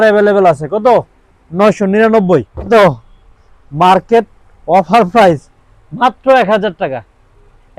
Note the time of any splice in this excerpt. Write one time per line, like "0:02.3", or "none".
0:02.7